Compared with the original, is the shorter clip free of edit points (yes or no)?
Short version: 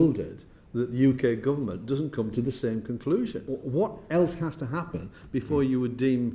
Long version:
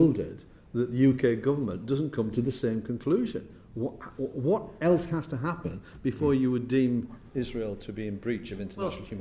no